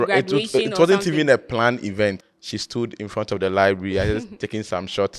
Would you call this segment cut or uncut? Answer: cut